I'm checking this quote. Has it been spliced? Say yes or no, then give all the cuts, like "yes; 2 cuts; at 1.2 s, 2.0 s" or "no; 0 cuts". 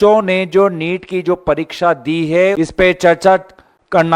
yes; 1 cut; at 2.5 s